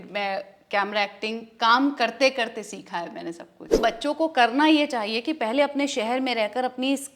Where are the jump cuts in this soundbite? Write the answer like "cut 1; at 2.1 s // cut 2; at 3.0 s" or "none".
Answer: cut 1; at 3.8 s